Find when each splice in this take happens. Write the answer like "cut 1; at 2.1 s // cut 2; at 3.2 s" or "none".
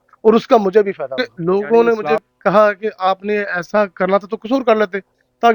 cut 1; at 1.2 s